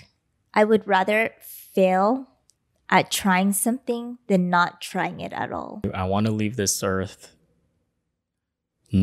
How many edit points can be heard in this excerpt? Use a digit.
1